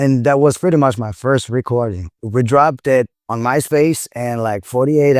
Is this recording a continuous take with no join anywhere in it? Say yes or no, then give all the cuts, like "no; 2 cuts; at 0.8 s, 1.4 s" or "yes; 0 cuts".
no; 1 cut; at 2.1 s